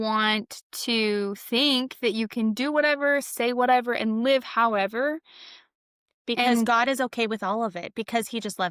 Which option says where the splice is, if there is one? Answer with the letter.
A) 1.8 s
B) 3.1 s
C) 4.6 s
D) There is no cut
D